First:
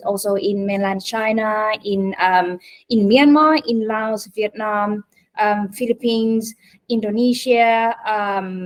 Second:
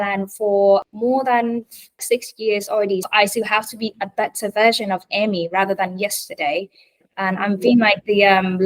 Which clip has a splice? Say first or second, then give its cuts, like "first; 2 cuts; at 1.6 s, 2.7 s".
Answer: second; 3 cuts; at 0.8 s, 2.0 s, 3.1 s